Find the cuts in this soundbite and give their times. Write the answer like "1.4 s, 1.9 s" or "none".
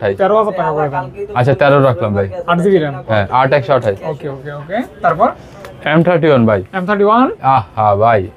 none